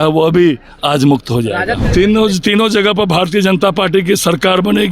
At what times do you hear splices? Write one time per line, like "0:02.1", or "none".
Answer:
0:01.7